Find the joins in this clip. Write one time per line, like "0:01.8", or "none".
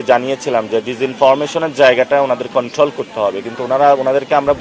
none